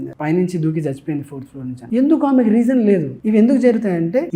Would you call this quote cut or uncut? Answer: uncut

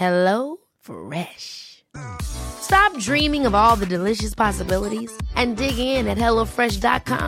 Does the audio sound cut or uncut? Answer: uncut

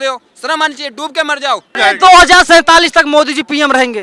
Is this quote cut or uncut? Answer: cut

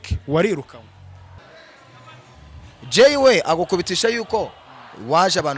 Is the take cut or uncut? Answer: cut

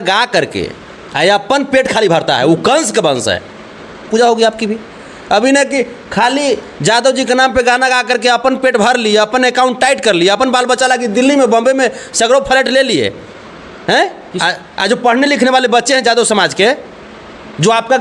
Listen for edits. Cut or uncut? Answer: cut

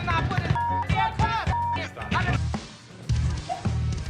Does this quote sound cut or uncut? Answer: cut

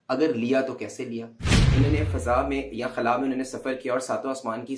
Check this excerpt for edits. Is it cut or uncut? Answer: cut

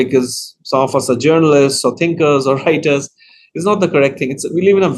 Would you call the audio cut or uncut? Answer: uncut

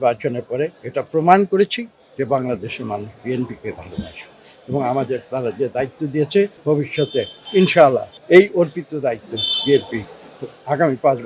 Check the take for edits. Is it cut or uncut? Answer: cut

